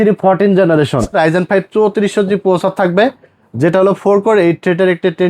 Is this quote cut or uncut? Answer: cut